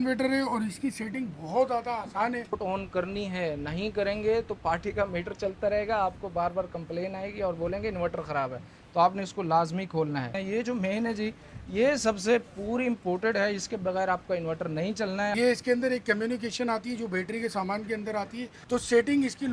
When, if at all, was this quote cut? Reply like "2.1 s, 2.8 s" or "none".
2.6 s, 10.4 s, 15.3 s, 18.5 s